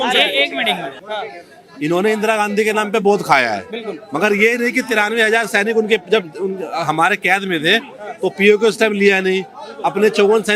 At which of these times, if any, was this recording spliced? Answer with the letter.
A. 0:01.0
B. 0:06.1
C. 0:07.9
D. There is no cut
A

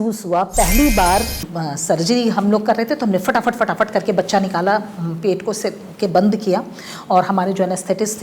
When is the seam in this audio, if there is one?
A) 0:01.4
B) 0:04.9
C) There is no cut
A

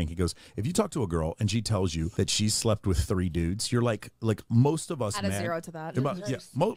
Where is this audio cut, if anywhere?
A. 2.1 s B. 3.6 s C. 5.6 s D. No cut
A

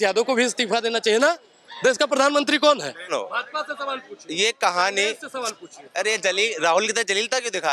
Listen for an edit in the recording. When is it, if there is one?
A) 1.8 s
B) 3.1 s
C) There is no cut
B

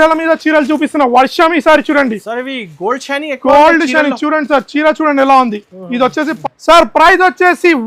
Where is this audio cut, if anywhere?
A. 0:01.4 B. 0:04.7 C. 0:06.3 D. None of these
C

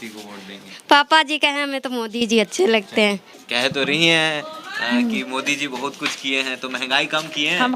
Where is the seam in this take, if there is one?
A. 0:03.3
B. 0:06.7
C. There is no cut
A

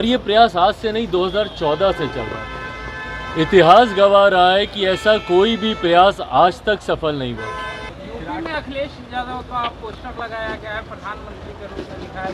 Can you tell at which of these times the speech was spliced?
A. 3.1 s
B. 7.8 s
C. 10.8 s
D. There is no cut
B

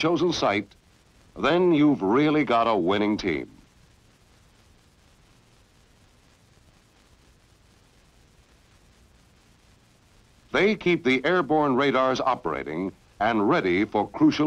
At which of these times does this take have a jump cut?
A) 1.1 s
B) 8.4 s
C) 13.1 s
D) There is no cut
B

